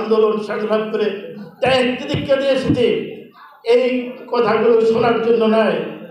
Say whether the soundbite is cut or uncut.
uncut